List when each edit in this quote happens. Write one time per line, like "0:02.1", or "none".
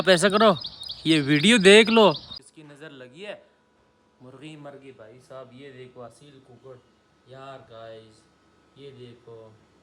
0:02.4